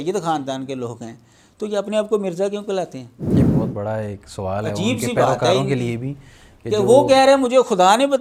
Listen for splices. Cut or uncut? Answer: uncut